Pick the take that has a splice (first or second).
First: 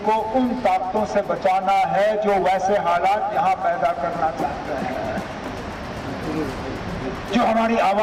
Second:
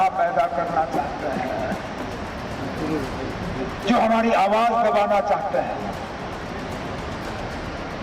second